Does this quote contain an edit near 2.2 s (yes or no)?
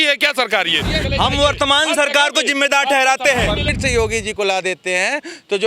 no